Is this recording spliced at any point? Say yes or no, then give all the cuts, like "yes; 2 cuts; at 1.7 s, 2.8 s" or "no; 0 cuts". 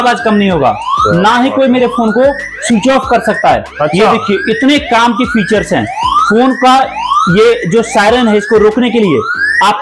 no; 0 cuts